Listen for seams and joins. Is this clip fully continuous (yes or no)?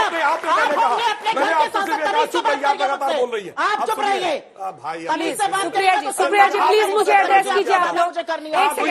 yes